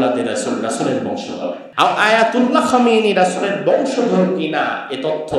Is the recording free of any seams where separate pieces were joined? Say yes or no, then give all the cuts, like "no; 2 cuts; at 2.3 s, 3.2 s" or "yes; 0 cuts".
no; 1 cut; at 1.6 s